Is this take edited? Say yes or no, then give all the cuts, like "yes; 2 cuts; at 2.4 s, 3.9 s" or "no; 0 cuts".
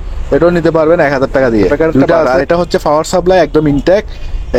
yes; 1 cut; at 2.3 s